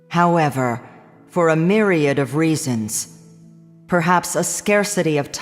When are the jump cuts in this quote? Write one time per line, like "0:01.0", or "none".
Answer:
0:02.6